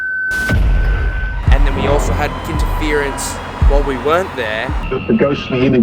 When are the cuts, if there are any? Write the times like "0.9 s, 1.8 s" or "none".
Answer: 1.2 s